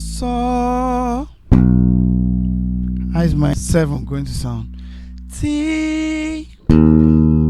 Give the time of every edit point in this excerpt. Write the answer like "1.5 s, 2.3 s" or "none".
3.5 s